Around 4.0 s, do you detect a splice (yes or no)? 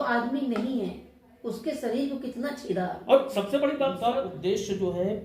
yes